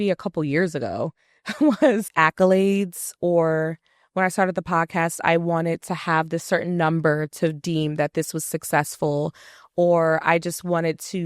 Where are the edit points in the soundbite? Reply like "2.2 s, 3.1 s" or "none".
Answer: 2.1 s